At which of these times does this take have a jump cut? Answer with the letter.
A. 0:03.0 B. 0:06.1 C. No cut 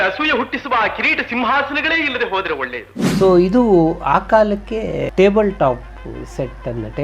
A